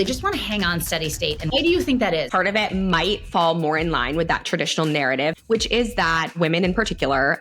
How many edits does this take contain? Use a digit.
4